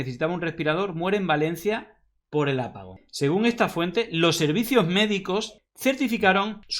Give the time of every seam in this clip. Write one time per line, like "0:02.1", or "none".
0:02.9